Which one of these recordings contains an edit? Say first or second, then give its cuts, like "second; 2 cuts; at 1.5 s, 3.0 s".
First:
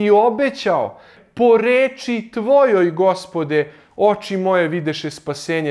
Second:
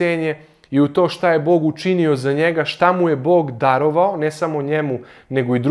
first; 1 cut; at 1.1 s